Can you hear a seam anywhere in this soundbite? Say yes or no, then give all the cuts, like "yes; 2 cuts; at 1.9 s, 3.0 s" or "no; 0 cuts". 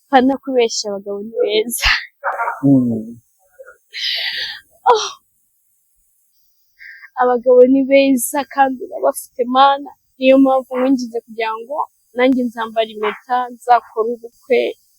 no; 0 cuts